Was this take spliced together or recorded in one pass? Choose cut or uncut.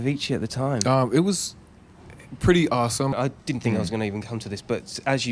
cut